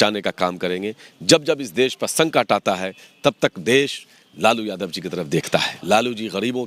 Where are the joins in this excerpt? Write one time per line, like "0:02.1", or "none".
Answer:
0:05.7